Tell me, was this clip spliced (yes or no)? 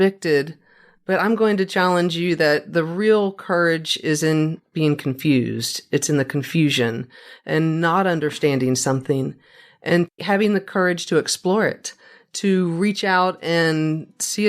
yes